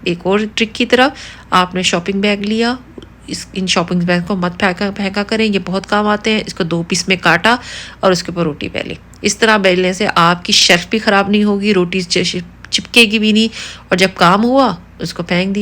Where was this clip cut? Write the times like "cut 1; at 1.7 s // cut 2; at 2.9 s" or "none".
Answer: none